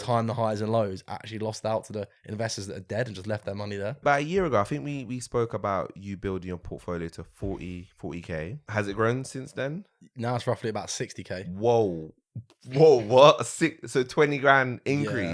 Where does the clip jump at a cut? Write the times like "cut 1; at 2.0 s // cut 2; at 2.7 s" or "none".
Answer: cut 1; at 4.0 s // cut 2; at 8.6 s